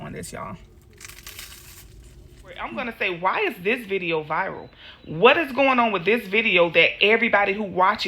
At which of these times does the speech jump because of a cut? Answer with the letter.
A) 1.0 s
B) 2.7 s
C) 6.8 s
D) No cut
B